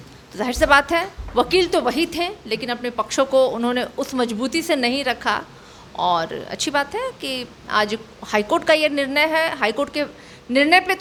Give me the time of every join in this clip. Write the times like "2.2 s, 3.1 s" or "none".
none